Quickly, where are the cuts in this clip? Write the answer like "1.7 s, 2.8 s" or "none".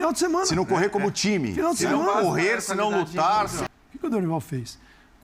3.6 s